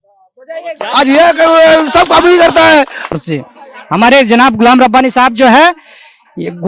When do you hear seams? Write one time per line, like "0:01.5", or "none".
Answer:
0:03.1